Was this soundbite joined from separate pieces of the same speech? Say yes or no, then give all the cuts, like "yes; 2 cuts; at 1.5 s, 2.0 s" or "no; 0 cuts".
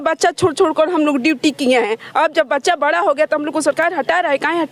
no; 0 cuts